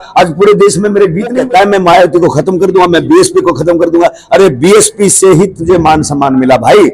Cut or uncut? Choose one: cut